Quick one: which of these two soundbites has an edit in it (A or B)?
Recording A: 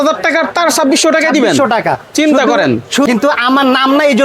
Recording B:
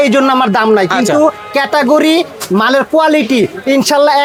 A